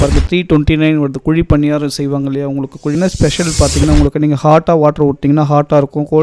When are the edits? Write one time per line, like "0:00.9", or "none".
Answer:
0:03.0